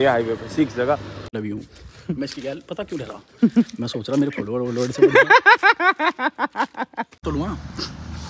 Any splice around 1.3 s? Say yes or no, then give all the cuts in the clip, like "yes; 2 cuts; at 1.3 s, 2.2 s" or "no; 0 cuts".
yes; 2 cuts; at 1.3 s, 7.2 s